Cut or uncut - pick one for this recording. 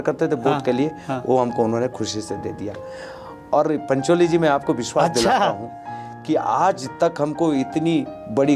uncut